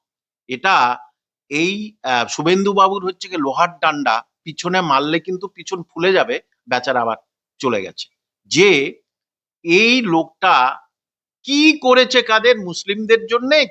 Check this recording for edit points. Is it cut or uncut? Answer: uncut